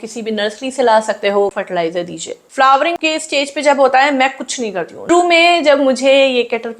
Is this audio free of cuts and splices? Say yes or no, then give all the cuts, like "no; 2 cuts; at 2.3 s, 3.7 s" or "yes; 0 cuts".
no; 2 cuts; at 1.5 s, 5.1 s